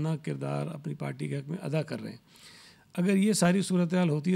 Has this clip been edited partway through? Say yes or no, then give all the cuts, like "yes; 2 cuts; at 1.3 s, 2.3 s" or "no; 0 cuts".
no; 0 cuts